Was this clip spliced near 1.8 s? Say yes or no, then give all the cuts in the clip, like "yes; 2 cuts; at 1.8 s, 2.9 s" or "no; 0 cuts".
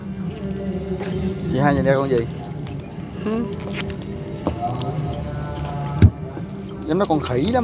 no; 0 cuts